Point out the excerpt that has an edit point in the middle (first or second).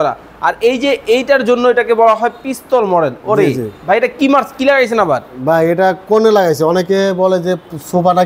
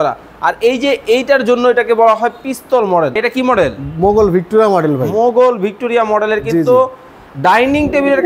second